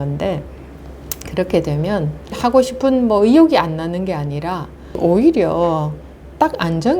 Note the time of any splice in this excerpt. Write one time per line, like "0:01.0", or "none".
0:02.3
0:05.0